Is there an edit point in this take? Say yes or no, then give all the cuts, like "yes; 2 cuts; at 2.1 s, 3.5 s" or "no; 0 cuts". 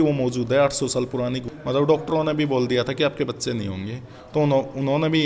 yes; 1 cut; at 1.5 s